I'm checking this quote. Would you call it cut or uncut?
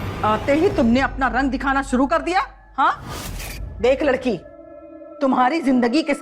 uncut